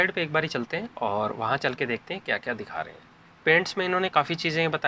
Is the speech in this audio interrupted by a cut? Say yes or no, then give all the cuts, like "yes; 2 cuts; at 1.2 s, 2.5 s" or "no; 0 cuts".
no; 0 cuts